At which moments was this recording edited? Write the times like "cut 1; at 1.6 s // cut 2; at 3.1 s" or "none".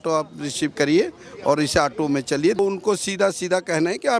cut 1; at 2.6 s